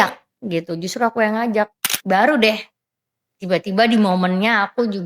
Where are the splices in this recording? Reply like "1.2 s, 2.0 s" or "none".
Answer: 1.9 s